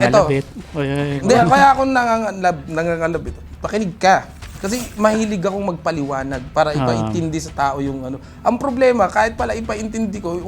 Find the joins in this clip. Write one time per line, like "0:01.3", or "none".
none